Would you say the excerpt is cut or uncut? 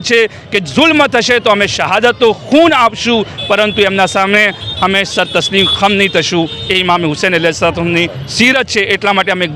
uncut